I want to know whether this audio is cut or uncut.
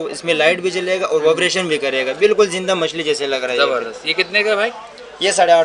uncut